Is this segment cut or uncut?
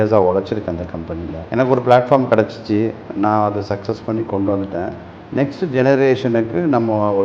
cut